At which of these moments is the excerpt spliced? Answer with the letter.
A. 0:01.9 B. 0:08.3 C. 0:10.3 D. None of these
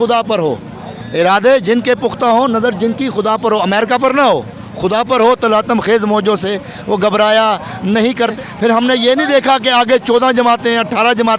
B